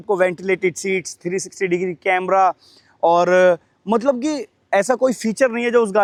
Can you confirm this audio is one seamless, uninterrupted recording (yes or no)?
yes